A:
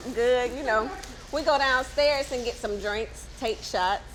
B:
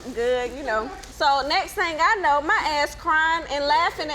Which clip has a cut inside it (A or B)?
B